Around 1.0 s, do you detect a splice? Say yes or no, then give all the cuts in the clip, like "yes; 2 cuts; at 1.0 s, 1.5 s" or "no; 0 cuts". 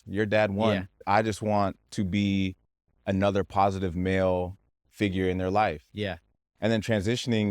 yes; 1 cut; at 1.0 s